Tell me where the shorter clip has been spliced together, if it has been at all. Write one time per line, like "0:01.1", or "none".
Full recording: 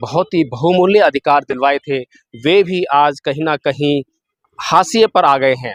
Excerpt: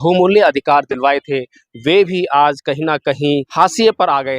0:03.5